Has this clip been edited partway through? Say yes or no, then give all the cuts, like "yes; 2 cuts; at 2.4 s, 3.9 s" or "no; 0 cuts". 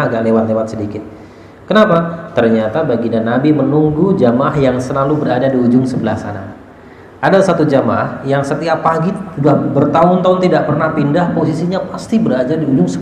no; 0 cuts